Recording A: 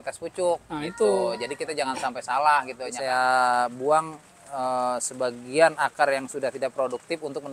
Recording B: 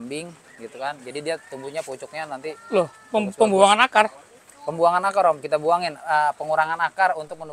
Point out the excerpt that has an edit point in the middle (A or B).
A